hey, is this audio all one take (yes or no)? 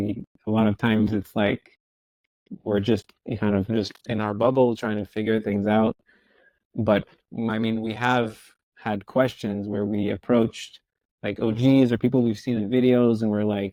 yes